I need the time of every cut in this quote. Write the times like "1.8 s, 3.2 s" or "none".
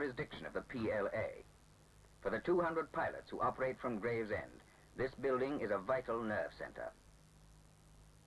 5.1 s